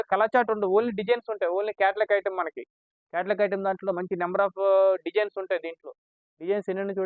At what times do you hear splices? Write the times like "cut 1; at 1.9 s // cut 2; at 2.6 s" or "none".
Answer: none